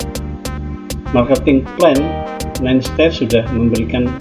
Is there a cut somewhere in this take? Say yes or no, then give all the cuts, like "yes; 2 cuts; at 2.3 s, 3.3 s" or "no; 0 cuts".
no; 0 cuts